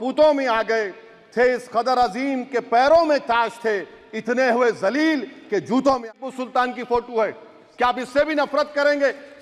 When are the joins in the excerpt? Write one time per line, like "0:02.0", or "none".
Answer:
0:06.0